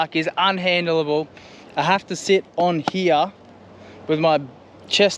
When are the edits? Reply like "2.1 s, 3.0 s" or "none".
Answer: none